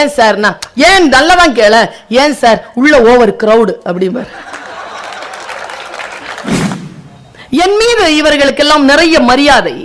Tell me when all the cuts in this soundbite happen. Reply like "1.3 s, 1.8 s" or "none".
6.8 s

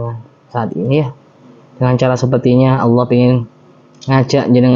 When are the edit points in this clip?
none

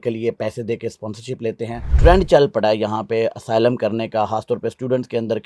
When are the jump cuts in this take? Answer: 1.9 s

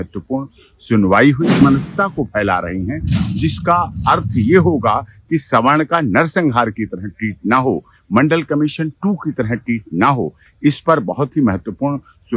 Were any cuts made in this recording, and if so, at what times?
1.6 s

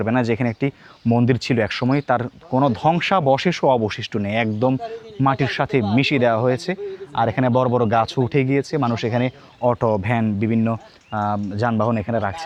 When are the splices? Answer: none

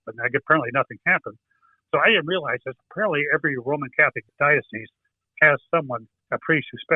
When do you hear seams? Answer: 4.2 s

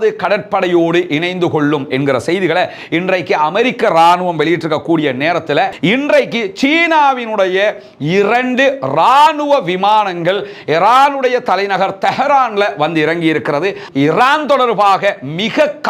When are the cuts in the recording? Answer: 5.7 s, 13.8 s

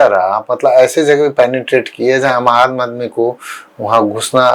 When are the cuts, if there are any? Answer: none

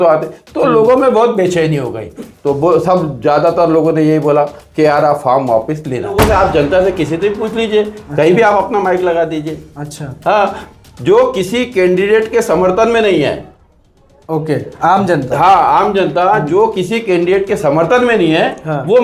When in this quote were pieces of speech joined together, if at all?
6.2 s

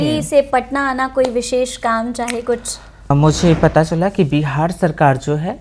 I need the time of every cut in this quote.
3.1 s

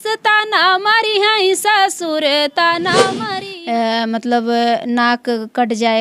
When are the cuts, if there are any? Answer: 3.2 s

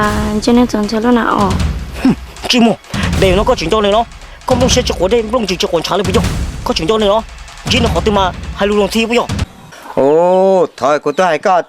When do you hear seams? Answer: 5.7 s

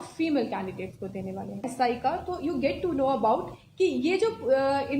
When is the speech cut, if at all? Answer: 1.7 s

